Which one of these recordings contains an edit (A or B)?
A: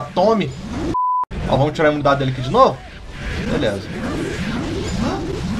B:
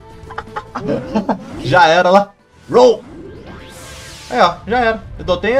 A